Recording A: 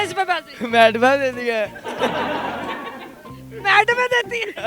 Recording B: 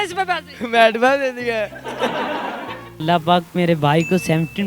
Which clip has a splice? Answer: B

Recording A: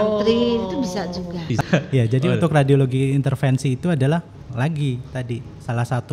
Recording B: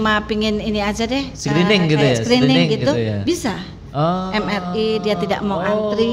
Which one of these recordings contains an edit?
A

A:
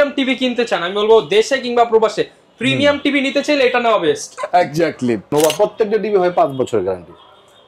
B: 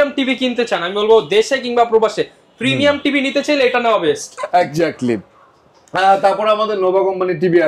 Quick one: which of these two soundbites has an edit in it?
A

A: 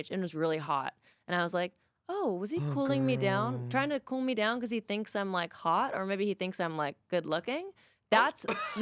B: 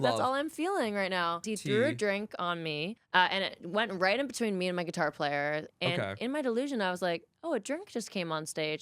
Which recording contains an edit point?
B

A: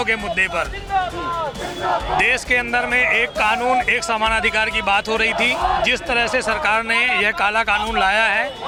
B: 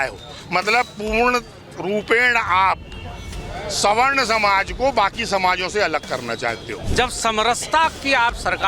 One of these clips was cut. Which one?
B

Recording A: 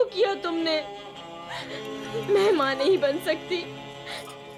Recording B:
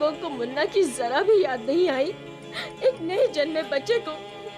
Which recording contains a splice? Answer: A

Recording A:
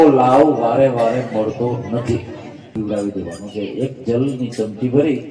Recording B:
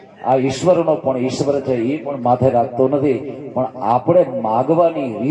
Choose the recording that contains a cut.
A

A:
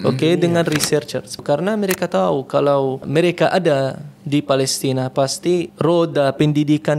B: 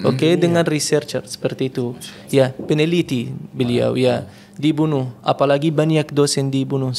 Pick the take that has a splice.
A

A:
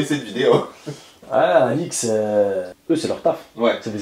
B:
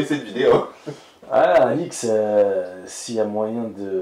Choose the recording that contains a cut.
A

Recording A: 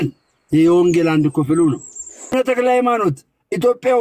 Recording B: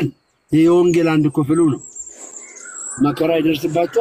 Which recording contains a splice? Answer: A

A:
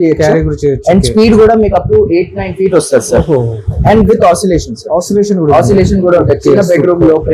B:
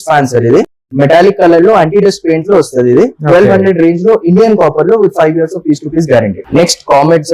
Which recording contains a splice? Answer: B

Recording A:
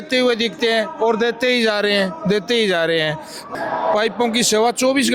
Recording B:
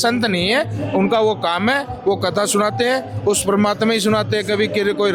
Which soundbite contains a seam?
A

